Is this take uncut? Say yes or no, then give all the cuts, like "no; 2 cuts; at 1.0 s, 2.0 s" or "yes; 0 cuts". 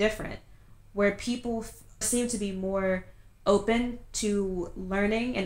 no; 1 cut; at 2.0 s